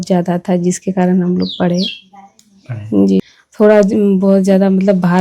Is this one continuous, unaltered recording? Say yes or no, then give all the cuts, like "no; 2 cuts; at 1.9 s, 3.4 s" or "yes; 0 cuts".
no; 1 cut; at 3.4 s